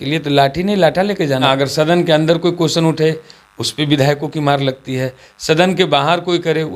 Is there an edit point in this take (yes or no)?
yes